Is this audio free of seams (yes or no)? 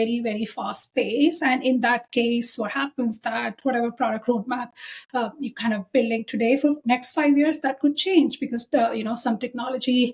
yes